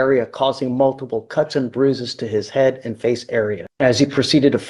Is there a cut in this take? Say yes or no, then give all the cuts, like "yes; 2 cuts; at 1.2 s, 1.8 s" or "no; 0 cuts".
yes; 1 cut; at 3.6 s